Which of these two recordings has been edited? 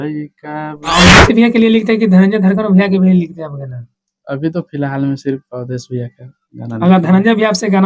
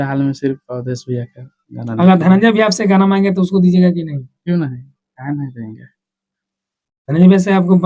first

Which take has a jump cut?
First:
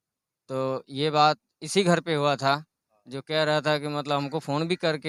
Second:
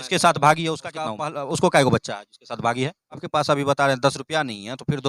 second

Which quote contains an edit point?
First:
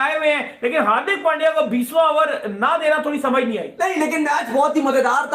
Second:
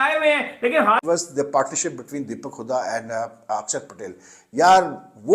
second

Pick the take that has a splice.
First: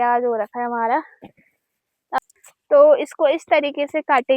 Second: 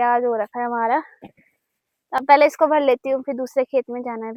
first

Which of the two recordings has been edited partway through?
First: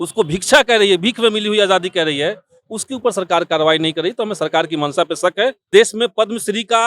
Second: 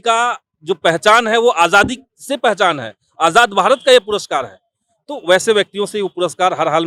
first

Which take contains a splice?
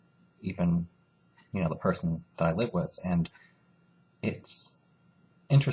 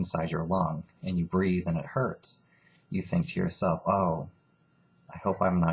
second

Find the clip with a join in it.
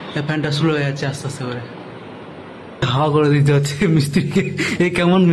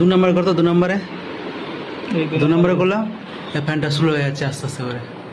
first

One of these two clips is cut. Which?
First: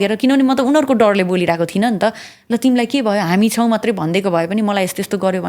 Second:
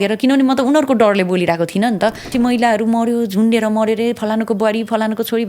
second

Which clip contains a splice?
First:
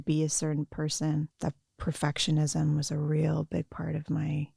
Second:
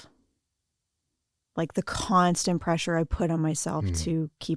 first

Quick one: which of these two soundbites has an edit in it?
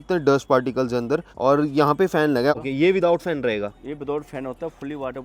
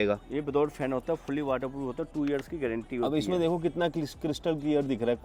first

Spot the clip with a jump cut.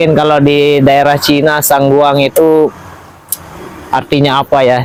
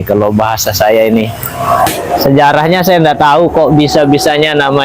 second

